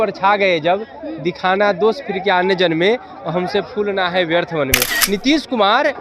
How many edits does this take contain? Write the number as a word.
one